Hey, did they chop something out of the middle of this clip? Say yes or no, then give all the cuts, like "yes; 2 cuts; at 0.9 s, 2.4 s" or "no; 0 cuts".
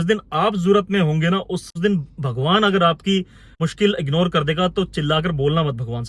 yes; 2 cuts; at 1.7 s, 3.6 s